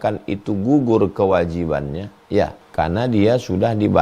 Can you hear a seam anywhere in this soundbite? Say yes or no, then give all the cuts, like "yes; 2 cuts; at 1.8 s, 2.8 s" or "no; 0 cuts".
yes; 1 cut; at 2.6 s